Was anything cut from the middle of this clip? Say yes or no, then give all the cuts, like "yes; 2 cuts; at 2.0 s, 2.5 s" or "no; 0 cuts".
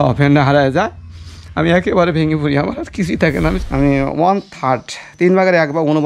yes; 1 cut; at 3.6 s